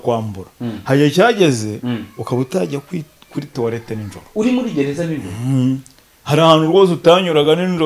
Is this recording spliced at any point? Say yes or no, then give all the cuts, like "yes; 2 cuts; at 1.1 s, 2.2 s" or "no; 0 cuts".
no; 0 cuts